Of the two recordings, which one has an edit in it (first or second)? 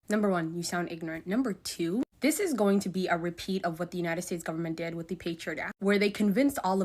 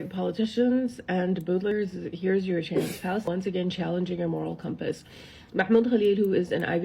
second